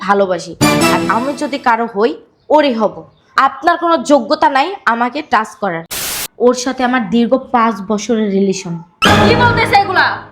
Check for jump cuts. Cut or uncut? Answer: cut